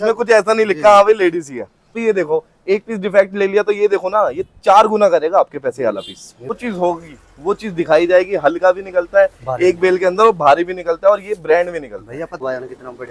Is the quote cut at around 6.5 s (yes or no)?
yes